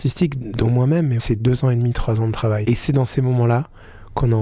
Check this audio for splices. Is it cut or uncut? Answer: cut